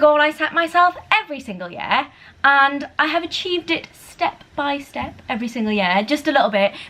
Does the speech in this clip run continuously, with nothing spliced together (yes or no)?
yes